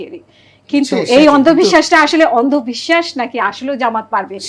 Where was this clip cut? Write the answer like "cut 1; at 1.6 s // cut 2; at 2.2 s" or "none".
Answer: none